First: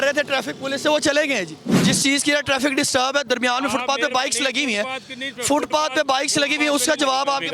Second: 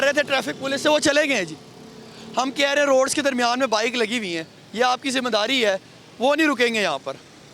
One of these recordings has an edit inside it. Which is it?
first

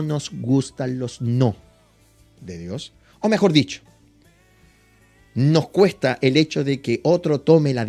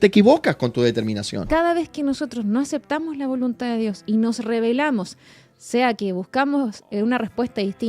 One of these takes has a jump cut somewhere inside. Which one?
second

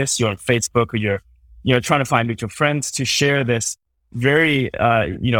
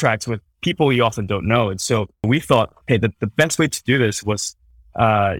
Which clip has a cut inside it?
second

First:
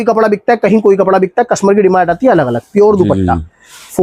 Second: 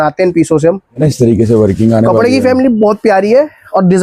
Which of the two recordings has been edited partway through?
second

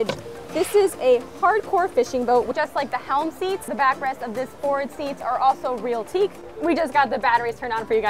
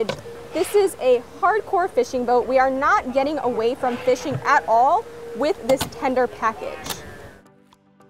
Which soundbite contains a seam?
first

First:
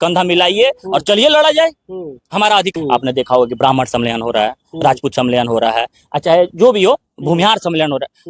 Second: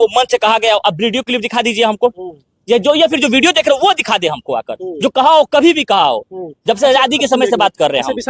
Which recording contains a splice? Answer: first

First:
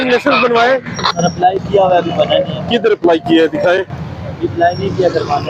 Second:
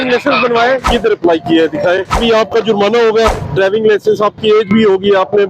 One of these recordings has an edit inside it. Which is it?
second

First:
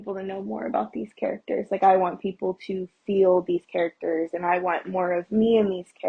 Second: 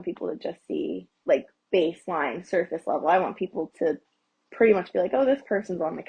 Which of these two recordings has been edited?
second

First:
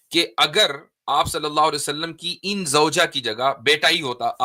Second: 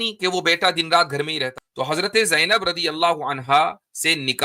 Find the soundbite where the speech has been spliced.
second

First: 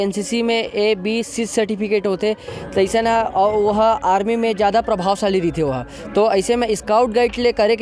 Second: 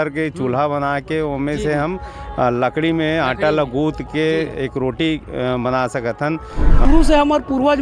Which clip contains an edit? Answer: second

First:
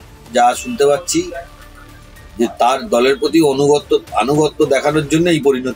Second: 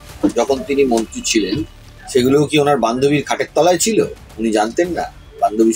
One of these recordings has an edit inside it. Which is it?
second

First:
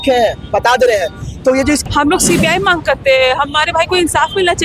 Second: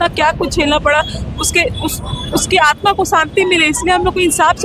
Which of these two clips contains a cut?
first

